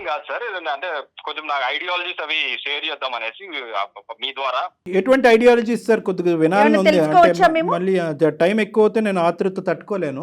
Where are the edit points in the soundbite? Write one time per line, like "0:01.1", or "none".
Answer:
0:04.8